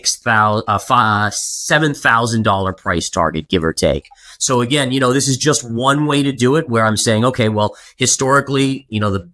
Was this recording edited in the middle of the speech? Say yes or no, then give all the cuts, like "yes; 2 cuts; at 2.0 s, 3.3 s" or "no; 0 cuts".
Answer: no; 0 cuts